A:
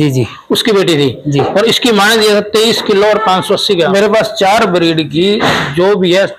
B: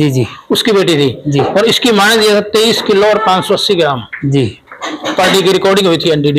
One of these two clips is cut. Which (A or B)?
A